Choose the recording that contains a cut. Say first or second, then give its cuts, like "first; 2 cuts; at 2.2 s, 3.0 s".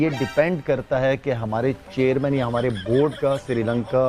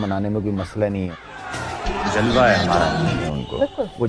second; 2 cuts; at 1.2 s, 3.0 s